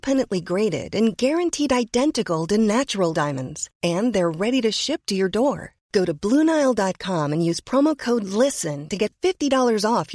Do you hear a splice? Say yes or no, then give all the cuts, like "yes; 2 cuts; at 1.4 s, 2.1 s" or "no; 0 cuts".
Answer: no; 0 cuts